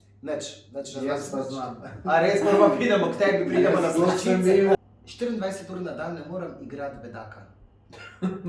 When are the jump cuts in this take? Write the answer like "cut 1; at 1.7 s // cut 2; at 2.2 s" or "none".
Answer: cut 1; at 4.8 s

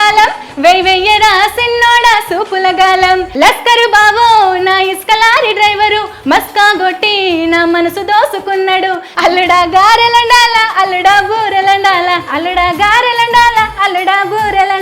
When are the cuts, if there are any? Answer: cut 1; at 3.3 s // cut 2; at 9.0 s

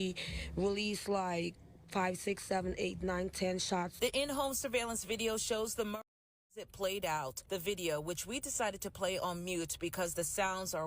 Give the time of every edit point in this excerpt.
cut 1; at 6.4 s

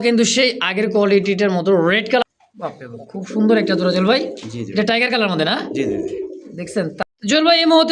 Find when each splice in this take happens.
cut 1; at 2.2 s // cut 2; at 6.9 s

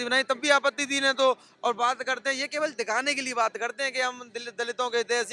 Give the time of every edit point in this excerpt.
none

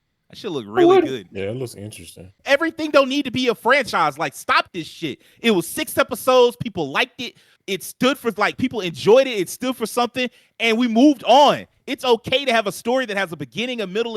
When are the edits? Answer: cut 1; at 2.3 s

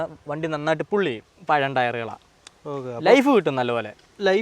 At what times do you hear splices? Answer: cut 1; at 1.2 s

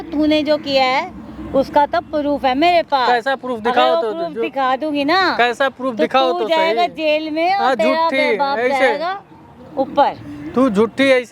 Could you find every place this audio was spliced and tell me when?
none

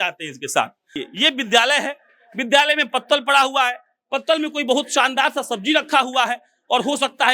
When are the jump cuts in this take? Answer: cut 1; at 0.9 s

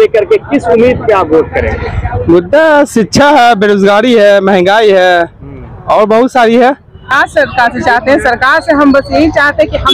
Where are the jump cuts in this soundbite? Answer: cut 1; at 7.0 s

